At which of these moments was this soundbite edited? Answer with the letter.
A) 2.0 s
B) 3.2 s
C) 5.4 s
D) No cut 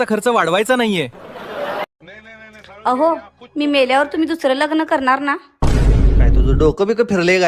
A